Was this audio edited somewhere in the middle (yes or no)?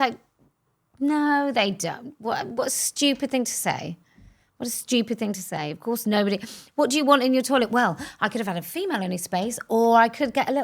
no